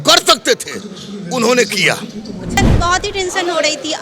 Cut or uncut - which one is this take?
cut